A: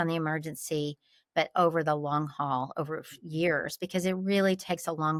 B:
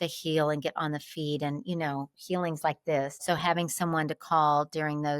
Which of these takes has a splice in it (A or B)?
B